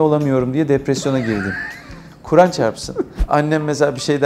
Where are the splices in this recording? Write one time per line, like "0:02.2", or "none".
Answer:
0:03.1